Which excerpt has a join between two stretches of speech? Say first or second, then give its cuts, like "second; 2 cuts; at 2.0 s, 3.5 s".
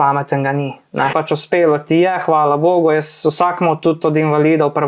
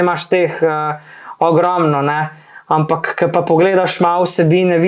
first; 1 cut; at 1.1 s